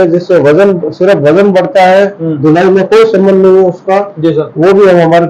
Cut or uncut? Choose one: cut